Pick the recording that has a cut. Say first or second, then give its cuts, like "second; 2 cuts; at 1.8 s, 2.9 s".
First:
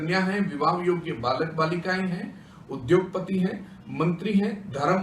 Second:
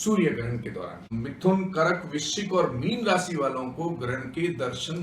second; 1 cut; at 1.1 s